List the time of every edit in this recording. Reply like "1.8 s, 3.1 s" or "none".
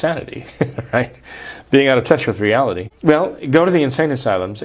2.9 s